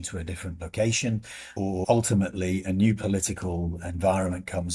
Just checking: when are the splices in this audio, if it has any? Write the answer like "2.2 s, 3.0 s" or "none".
1.8 s